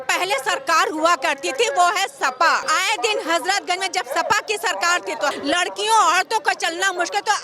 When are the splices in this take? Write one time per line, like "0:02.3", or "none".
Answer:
0:02.6
0:05.3